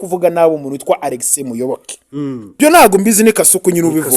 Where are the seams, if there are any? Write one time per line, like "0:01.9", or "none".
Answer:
0:02.6